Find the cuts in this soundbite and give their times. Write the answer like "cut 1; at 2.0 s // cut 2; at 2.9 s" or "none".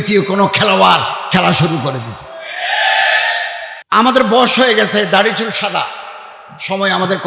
cut 1; at 3.7 s